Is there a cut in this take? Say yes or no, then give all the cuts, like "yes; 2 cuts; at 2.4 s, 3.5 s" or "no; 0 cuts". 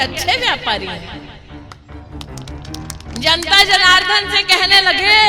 yes; 2 cuts; at 1.1 s, 2.8 s